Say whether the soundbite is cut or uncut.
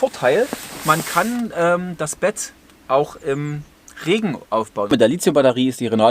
cut